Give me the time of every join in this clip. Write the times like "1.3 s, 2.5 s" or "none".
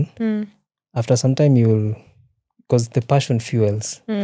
none